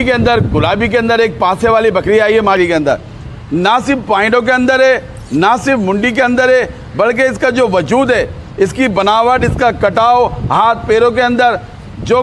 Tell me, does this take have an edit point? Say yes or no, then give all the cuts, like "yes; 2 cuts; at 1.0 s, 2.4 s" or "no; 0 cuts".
yes; 1 cut; at 2.6 s